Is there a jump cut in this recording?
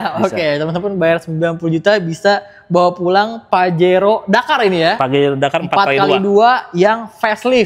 no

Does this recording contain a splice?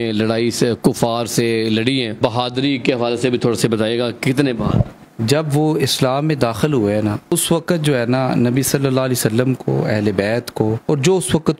yes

